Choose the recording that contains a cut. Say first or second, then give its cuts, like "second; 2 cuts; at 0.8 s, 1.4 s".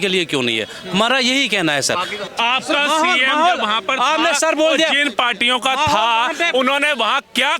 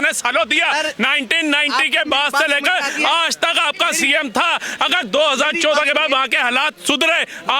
first; 1 cut; at 2.2 s